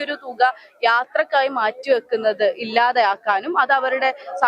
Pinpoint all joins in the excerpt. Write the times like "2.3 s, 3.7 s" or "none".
none